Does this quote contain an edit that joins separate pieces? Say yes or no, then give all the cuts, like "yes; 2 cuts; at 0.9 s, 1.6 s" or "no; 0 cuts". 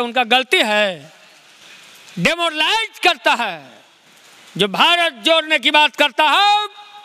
no; 0 cuts